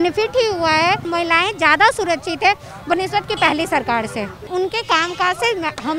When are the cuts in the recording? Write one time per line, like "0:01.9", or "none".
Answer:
0:01.1
0:04.4